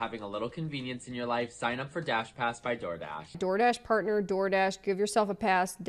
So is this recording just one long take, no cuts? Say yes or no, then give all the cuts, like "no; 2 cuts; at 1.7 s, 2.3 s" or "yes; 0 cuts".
yes; 0 cuts